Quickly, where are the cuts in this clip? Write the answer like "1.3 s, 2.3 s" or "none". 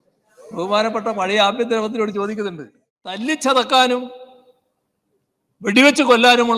3.2 s